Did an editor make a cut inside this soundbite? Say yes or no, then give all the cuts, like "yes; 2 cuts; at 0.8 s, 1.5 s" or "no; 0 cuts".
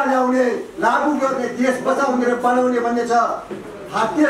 no; 0 cuts